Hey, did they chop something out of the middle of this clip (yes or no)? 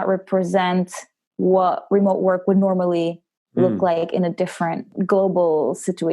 yes